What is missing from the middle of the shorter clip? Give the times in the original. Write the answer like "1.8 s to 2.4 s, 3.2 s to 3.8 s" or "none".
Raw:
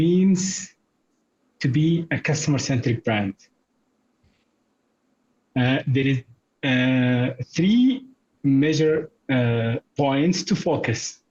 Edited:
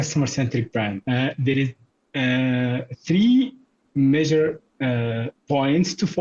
3.3 s to 5.5 s